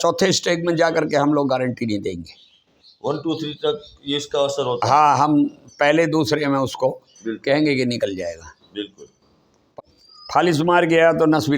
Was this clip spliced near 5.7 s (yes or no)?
no